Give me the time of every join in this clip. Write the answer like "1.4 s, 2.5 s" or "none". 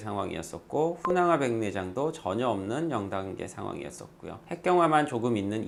none